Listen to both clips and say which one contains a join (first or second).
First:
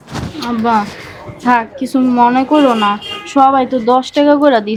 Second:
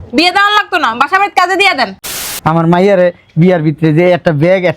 second